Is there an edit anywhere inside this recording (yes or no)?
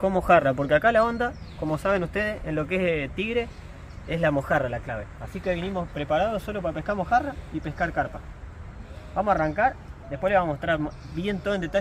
no